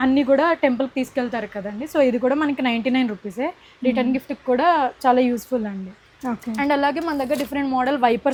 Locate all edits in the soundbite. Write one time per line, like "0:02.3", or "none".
none